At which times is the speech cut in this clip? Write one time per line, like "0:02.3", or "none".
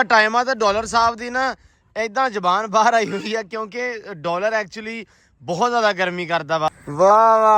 0:06.7